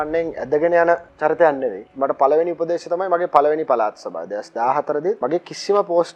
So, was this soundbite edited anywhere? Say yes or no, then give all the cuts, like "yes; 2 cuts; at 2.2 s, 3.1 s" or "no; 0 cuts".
yes; 3 cuts; at 1.1 s, 1.8 s, 5.2 s